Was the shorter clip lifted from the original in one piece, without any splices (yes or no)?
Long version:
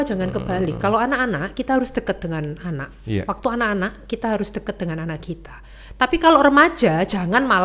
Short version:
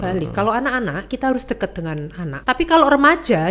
no